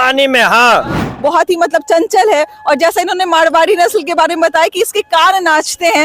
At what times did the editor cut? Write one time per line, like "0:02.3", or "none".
0:01.0